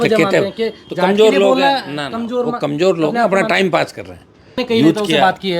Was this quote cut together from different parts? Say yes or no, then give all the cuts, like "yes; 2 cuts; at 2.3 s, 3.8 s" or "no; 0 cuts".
yes; 1 cut; at 4.6 s